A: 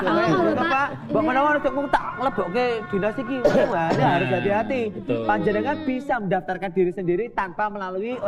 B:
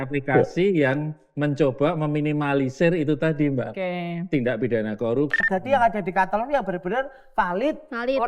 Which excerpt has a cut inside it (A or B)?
B